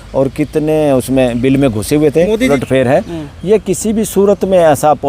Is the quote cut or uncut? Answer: cut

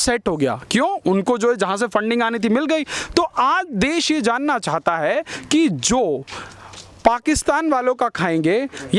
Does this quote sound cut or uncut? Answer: uncut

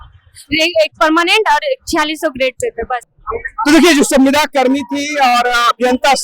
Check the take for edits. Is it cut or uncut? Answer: uncut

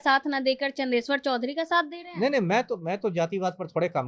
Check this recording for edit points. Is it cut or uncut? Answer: uncut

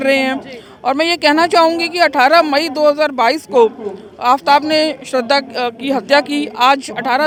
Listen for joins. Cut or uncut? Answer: uncut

